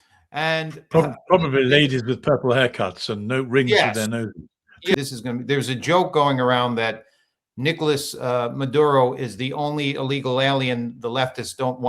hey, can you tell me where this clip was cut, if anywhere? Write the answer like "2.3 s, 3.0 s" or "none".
4.9 s